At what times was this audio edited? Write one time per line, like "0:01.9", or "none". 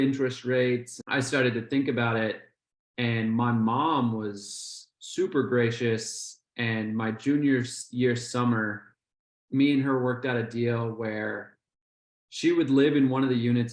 0:00.9